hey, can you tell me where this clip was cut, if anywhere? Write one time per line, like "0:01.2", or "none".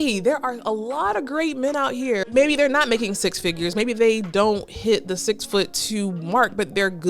none